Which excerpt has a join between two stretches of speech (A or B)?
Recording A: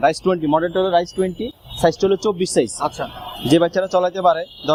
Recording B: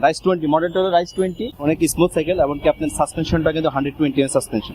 B